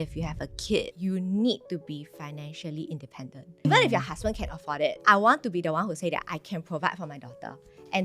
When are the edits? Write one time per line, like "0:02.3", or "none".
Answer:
0:00.9
0:03.7
0:05.0